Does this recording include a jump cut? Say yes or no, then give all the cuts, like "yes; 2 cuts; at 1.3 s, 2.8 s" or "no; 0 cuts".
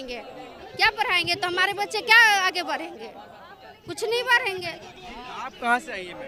no; 0 cuts